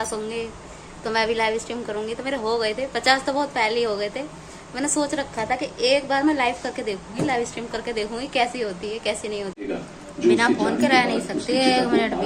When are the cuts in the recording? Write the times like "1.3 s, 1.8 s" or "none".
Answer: 9.5 s